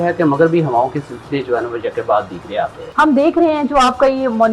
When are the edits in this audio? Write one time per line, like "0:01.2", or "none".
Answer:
0:02.8